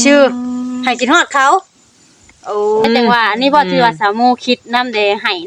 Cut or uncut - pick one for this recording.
cut